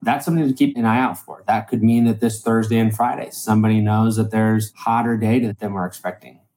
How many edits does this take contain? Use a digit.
3